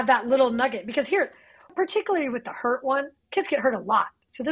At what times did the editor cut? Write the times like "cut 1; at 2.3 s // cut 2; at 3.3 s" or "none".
cut 1; at 1.7 s